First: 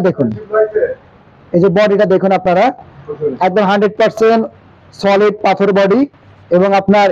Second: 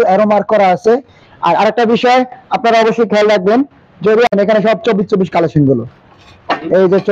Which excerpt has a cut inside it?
second; 1 cut; at 4.3 s

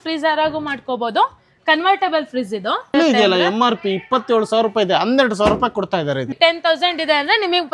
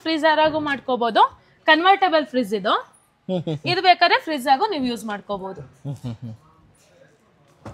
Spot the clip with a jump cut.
first; 2 cuts; at 2.9 s, 6.3 s

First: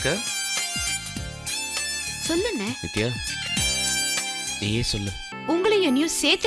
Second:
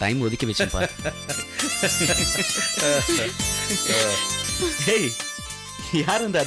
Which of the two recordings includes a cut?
first; 1 cut; at 5.3 s

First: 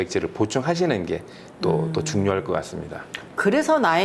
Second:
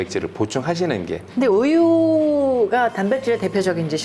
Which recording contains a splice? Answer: second; 1 cut; at 1.2 s

